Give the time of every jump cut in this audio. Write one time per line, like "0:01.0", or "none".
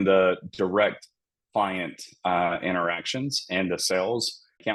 none